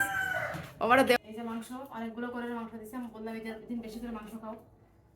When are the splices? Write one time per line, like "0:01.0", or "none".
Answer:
0:01.2